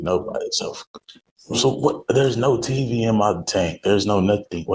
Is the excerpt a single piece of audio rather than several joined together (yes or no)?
yes